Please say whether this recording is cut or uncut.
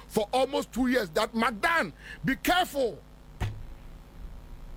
uncut